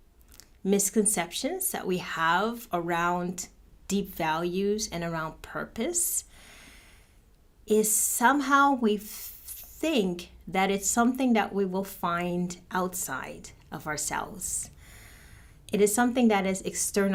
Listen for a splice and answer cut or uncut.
uncut